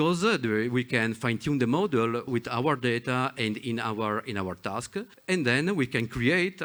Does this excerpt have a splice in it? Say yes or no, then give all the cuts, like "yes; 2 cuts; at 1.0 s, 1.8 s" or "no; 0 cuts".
yes; 2 cuts; at 2.3 s, 5.1 s